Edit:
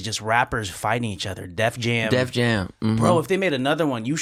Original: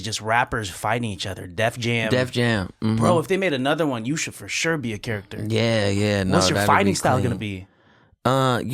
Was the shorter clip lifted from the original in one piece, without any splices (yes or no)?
yes